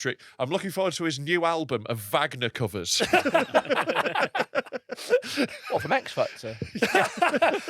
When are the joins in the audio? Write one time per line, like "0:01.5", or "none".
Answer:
none